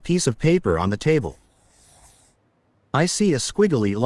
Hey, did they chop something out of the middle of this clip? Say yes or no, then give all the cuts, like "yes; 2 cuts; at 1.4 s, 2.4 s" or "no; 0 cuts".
no; 0 cuts